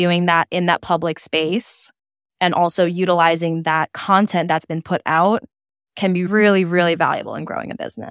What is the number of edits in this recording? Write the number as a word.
zero